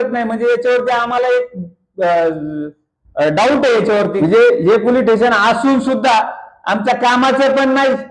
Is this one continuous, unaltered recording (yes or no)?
no